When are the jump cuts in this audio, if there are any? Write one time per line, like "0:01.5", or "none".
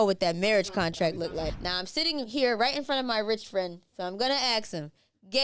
0:01.4